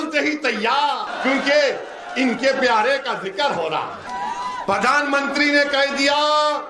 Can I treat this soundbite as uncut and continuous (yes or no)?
no